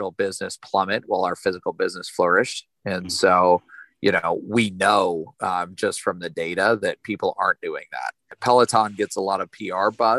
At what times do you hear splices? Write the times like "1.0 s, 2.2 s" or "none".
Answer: 8.3 s